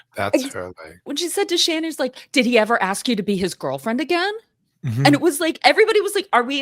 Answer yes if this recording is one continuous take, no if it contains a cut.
no